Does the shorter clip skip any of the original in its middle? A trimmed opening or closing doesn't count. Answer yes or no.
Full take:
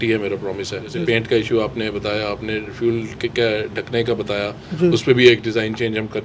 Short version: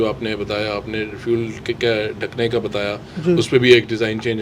no